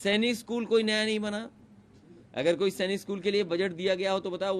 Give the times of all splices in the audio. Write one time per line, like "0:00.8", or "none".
none